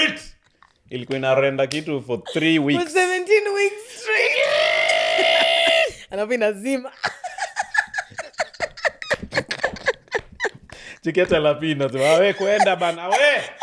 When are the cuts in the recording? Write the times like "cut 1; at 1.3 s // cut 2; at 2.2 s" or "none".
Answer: none